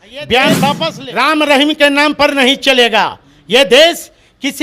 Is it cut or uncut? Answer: cut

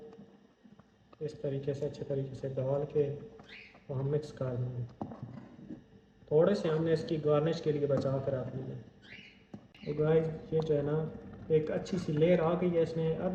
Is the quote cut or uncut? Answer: uncut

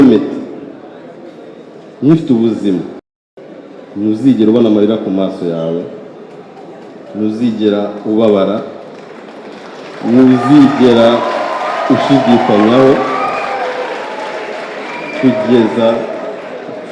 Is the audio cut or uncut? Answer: uncut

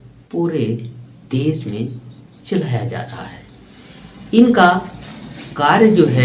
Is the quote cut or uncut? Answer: uncut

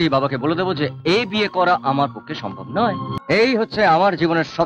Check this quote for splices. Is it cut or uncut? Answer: cut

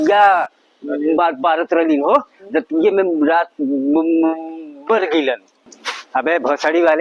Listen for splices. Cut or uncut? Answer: cut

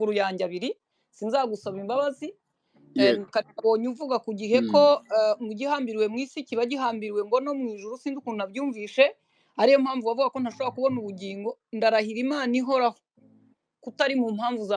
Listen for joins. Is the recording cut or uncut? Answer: uncut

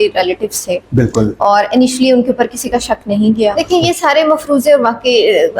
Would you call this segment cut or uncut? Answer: cut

